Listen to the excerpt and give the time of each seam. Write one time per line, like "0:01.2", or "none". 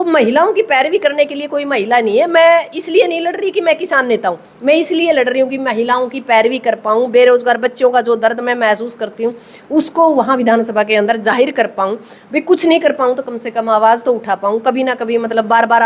none